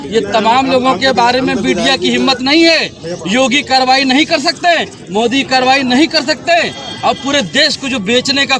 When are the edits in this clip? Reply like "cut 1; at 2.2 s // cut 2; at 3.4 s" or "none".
none